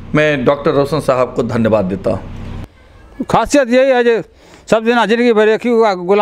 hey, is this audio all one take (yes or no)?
no